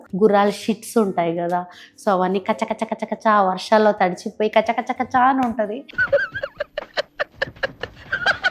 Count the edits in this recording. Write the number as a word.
zero